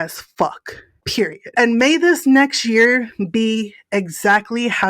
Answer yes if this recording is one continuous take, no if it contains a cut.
no